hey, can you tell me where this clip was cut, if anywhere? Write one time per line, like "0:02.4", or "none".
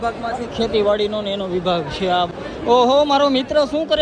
0:02.3